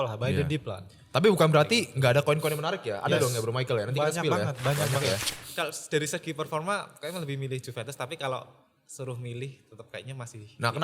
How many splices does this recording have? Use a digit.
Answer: 1